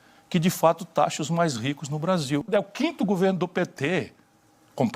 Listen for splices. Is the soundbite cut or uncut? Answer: cut